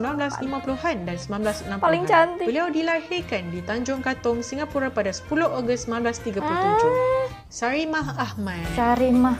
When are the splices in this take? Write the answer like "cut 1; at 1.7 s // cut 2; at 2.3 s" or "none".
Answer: cut 1; at 7.4 s